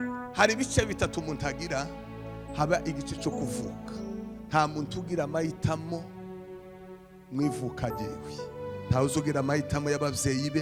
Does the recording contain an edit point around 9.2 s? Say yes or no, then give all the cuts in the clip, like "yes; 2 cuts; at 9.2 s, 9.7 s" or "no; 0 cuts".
no; 0 cuts